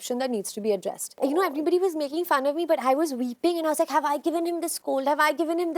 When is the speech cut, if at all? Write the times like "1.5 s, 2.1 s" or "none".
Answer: 1.1 s